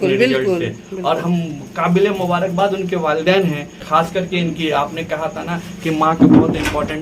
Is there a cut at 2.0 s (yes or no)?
no